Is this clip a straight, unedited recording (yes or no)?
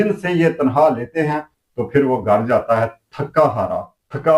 no